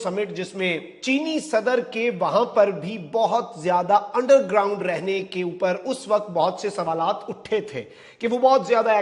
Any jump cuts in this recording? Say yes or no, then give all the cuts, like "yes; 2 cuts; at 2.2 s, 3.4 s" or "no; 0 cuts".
yes; 1 cut; at 0.9 s